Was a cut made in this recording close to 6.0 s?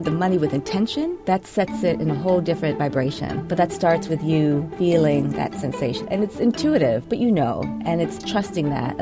yes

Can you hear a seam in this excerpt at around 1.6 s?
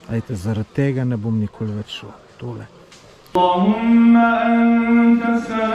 no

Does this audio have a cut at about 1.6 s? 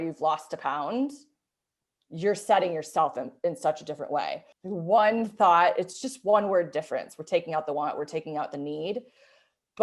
no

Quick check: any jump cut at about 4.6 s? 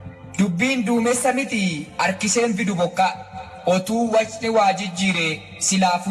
yes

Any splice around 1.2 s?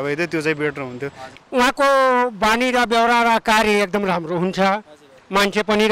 yes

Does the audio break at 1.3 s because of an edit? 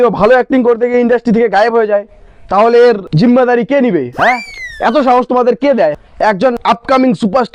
no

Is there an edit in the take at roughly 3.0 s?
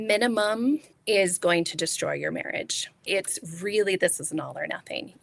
yes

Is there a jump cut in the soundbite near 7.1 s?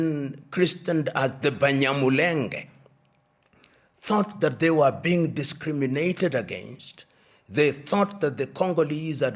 no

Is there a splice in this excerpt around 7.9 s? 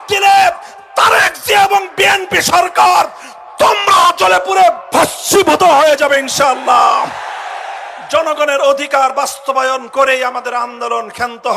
no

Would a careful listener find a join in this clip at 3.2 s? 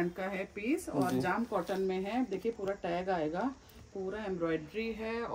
no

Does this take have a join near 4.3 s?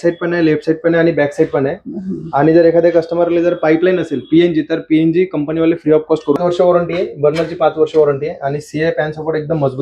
no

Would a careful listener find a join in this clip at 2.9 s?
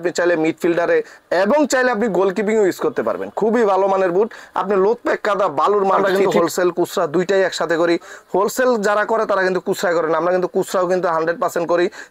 no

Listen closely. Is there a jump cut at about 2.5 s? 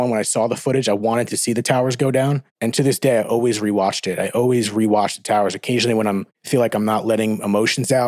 yes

